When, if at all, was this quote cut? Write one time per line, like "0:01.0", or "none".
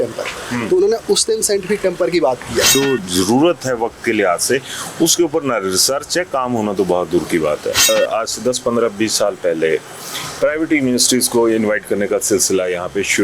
0:02.7
0:07.9